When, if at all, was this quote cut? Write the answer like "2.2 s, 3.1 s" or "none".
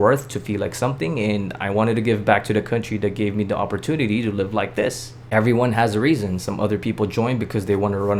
5.1 s